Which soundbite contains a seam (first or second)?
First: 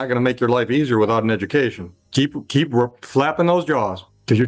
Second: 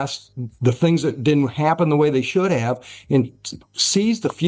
first